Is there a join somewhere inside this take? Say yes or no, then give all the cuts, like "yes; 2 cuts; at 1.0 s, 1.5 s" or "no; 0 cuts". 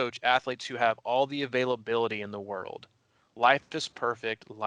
no; 0 cuts